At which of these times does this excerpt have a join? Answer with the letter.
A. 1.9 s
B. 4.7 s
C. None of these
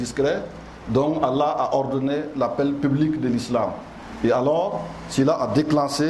C